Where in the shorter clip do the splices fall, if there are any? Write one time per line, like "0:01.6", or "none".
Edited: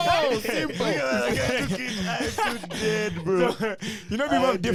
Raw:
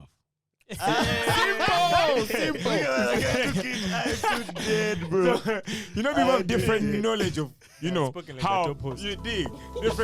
none